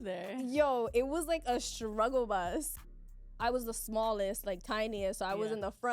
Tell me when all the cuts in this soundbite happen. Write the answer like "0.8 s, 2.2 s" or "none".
2.7 s